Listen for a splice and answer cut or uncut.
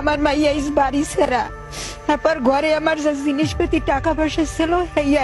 uncut